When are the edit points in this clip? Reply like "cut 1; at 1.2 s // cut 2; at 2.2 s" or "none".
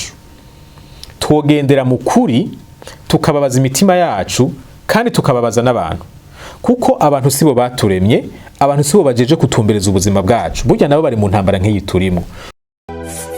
cut 1; at 12.4 s